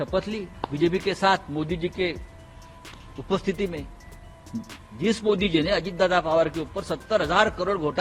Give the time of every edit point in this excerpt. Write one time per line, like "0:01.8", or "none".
none